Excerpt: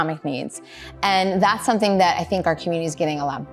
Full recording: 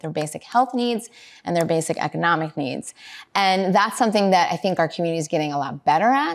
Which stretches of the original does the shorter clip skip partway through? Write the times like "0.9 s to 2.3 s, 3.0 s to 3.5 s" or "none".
none